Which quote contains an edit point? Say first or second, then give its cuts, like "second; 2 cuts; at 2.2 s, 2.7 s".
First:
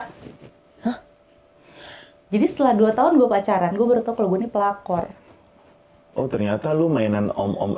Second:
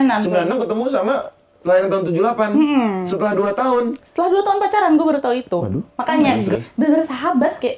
second; 1 cut; at 6.5 s